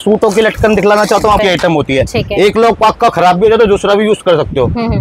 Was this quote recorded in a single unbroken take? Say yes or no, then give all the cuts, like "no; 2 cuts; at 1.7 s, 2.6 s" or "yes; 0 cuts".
no; 1 cut; at 1.4 s